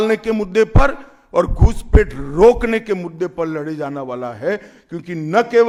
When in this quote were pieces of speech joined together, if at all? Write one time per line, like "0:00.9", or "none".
none